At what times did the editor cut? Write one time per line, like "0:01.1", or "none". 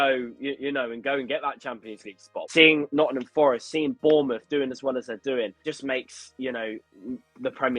0:02.3
0:05.6